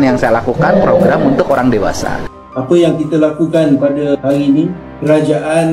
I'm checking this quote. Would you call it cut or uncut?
cut